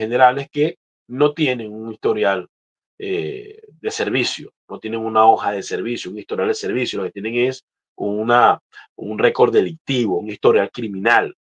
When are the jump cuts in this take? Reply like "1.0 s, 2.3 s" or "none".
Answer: none